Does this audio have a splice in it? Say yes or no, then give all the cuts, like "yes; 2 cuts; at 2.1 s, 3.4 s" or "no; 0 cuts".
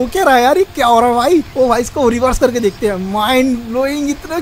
no; 0 cuts